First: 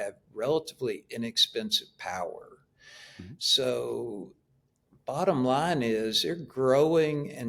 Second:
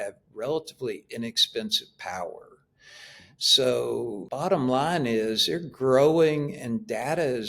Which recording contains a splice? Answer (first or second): second